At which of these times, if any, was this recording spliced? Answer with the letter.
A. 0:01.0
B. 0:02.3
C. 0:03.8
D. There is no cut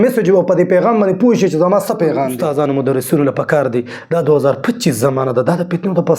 B